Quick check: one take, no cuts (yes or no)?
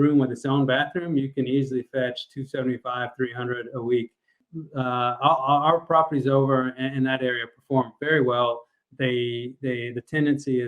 no